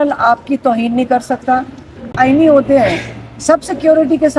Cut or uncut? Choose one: cut